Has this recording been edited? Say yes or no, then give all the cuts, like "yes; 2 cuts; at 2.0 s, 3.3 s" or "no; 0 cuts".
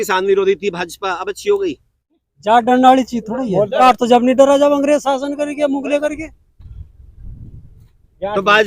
yes; 2 cuts; at 2.2 s, 3.8 s